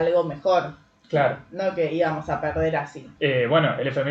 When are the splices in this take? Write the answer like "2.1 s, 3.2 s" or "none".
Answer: 3.0 s